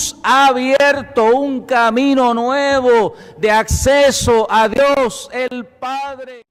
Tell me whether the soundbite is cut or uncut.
uncut